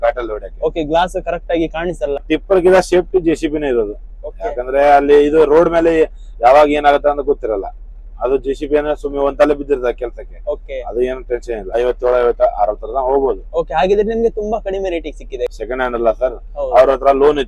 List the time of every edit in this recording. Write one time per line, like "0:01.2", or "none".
0:02.2
0:11.8
0:15.5